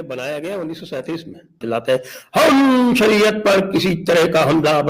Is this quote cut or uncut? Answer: cut